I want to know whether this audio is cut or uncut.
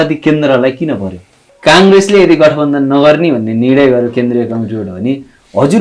cut